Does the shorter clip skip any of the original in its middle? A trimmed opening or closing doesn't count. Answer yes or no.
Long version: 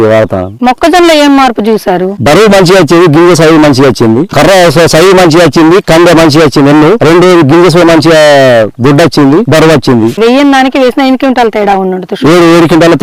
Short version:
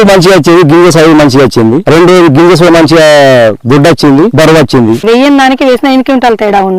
yes